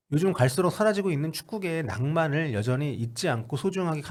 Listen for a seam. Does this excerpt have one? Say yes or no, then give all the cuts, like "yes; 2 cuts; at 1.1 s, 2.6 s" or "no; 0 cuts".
no; 0 cuts